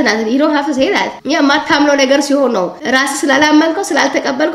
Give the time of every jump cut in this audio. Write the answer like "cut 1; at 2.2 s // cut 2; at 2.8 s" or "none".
cut 1; at 1.2 s